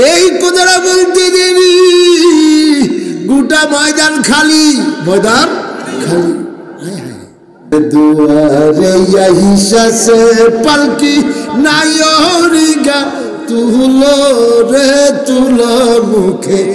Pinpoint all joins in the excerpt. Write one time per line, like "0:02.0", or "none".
0:07.7